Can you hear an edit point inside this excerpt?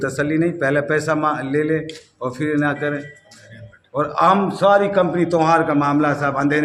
no; 0 cuts

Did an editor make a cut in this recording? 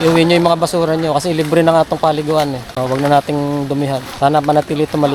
yes; 2 cuts; at 2.7 s, 4.1 s

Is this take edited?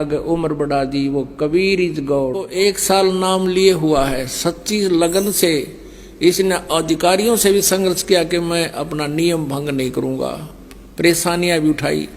yes; 1 cut; at 2.4 s

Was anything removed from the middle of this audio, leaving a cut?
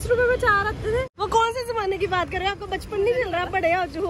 yes; 1 cut; at 1.2 s

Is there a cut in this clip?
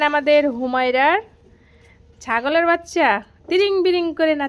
no; 0 cuts

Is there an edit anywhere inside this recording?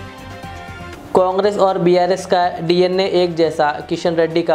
yes; 1 cut; at 0.9 s

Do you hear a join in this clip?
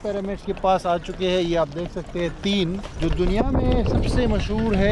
yes; 1 cut; at 2.9 s

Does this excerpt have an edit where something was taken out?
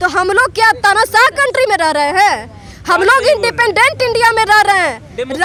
no; 0 cuts

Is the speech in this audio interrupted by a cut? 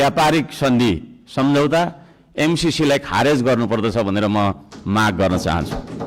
no; 0 cuts

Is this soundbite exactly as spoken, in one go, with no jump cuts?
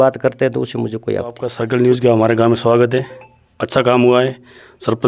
no; 1 cut; at 1.5 s

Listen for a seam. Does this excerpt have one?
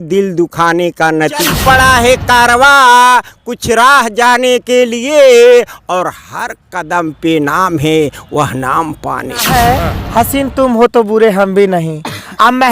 yes; 2 cuts; at 1.5 s, 9.4 s

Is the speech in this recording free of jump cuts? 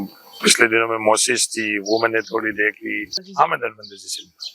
no; 1 cut; at 3.2 s

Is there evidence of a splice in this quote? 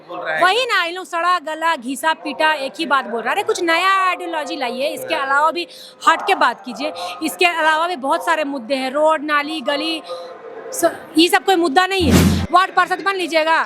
yes; 1 cut; at 12.3 s

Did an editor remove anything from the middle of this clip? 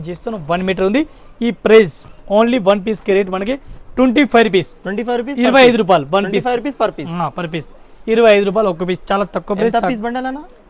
no; 0 cuts

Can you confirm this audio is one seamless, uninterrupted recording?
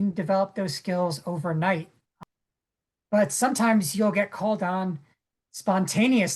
no; 1 cut; at 2.1 s

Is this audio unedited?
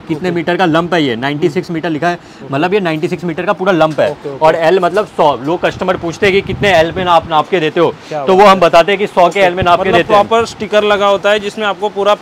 yes; 0 cuts

